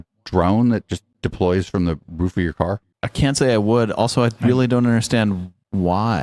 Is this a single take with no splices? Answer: yes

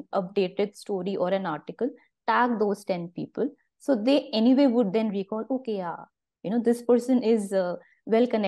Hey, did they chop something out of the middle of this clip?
no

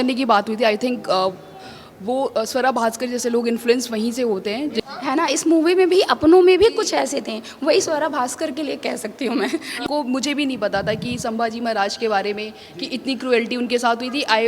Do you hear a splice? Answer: yes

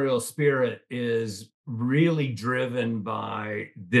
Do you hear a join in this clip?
no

